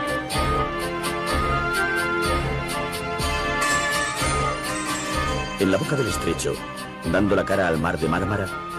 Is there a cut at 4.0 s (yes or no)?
no